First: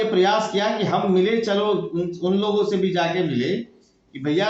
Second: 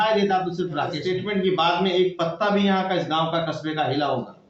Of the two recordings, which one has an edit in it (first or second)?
second